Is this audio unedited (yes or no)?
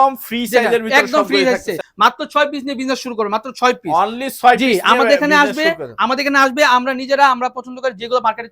no